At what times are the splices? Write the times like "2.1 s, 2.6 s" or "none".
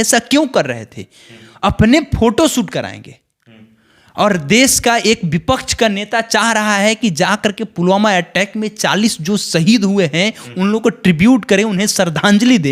none